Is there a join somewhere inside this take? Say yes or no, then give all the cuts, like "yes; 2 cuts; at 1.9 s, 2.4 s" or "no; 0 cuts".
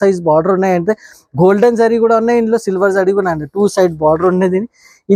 no; 0 cuts